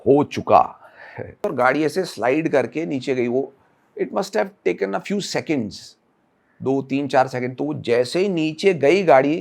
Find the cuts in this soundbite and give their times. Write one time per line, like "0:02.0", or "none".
0:01.4